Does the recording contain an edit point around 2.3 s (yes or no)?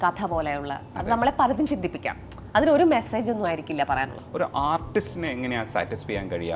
no